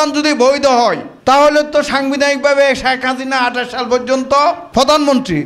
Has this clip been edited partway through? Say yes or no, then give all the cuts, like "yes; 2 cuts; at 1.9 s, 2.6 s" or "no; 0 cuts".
yes; 2 cuts; at 1.1 s, 4.6 s